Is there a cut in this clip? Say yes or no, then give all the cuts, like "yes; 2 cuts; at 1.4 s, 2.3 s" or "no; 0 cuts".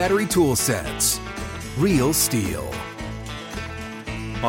no; 0 cuts